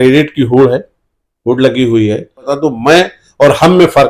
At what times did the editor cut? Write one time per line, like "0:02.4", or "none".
0:02.5